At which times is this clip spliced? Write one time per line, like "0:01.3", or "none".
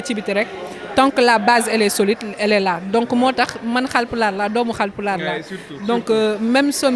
none